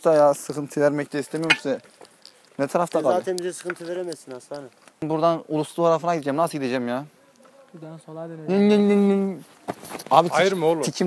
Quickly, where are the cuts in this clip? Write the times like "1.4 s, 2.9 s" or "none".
5.0 s